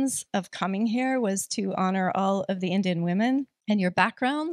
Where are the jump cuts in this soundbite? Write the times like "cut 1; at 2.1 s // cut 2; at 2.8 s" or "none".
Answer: cut 1; at 3.5 s